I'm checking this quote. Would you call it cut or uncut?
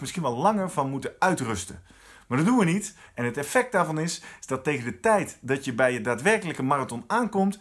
cut